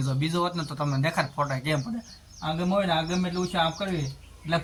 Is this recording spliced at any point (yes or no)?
no